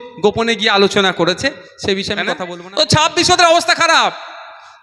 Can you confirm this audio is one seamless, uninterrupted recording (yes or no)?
no